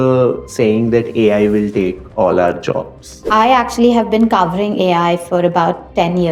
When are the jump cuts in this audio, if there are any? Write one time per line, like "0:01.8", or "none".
0:03.2